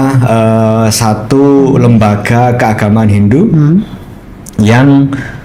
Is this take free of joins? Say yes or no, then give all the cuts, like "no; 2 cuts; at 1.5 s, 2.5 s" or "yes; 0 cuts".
yes; 0 cuts